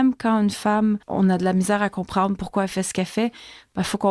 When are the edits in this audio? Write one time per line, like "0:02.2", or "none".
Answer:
0:01.1